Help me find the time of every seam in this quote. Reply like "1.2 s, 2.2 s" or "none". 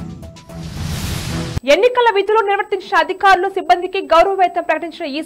0.9 s